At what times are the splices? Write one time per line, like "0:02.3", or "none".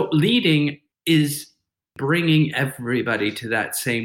0:00.9
0:01.9